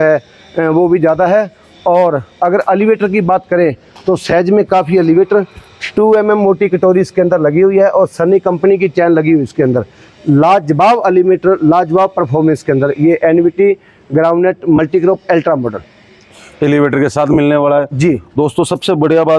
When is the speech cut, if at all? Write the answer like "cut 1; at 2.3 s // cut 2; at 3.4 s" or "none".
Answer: none

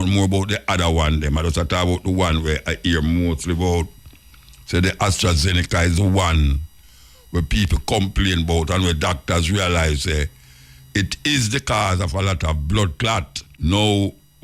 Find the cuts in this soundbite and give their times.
cut 1; at 13.4 s

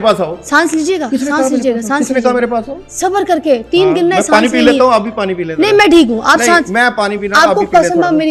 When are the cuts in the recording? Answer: none

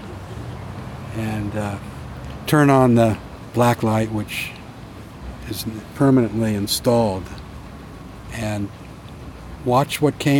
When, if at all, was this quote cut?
cut 1; at 9.3 s

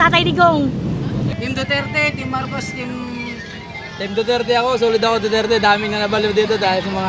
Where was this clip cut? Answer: cut 1; at 1.3 s

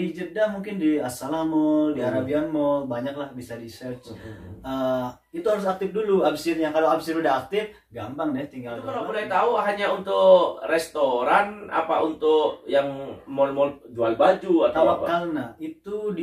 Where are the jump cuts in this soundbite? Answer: cut 1; at 9.0 s

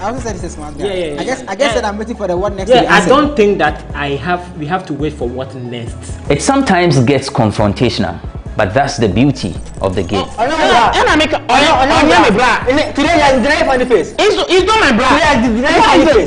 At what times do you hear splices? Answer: none

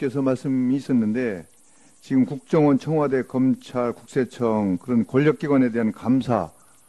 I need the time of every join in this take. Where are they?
cut 1; at 3.8 s

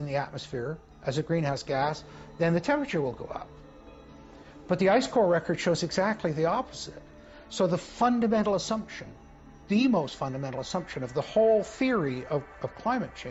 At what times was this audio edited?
none

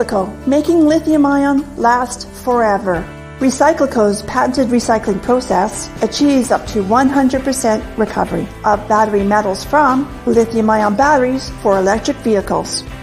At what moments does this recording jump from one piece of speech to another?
cut 1; at 2.1 s

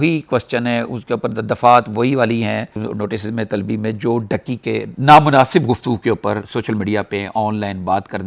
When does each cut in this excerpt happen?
cut 1; at 4.9 s

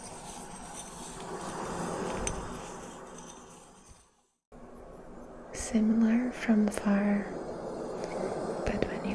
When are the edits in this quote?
cut 1; at 4.4 s

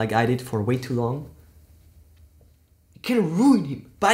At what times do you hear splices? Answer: cut 1; at 2.9 s

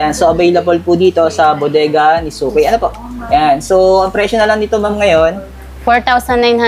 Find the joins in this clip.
none

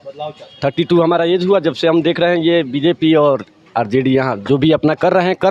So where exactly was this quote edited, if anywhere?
none

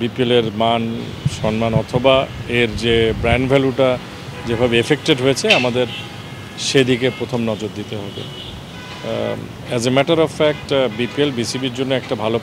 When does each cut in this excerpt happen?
none

